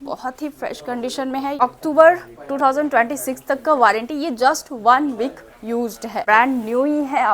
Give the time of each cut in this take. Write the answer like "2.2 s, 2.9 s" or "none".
1.6 s, 6.2 s